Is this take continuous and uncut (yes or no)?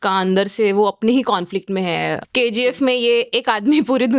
no